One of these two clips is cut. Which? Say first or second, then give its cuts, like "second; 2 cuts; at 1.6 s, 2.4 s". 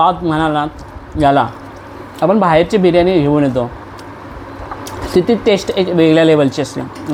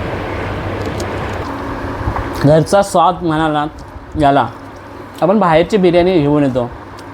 second; 1 cut; at 1.4 s